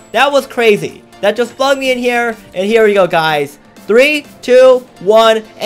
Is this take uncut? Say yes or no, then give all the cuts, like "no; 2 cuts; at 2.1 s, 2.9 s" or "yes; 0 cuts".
no; 1 cut; at 2.4 s